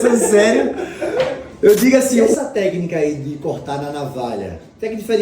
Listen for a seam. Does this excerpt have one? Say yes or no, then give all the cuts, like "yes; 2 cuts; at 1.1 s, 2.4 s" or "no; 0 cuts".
yes; 1 cut; at 2.3 s